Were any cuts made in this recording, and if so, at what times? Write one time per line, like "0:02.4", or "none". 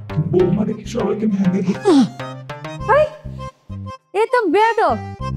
none